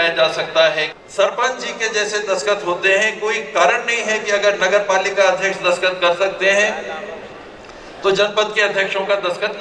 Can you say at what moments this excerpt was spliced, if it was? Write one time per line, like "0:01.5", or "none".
0:00.9